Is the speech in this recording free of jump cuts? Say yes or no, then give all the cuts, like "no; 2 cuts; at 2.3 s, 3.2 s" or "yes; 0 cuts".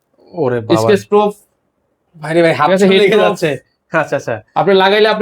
yes; 0 cuts